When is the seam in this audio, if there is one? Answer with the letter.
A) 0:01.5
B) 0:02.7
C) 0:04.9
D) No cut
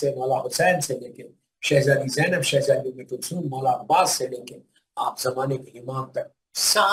D